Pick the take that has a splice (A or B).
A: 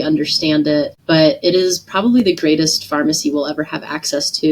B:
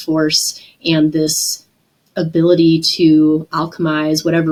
A